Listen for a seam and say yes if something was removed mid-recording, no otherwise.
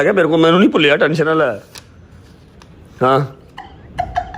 no